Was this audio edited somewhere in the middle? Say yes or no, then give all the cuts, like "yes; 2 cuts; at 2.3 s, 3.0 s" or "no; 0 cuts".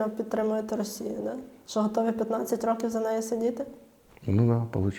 no; 0 cuts